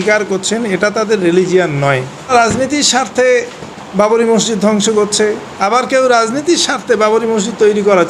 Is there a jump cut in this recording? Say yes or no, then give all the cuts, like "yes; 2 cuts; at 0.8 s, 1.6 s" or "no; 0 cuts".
yes; 1 cut; at 2.3 s